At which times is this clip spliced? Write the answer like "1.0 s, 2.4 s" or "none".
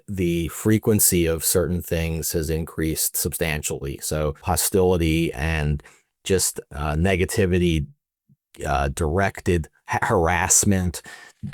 4.4 s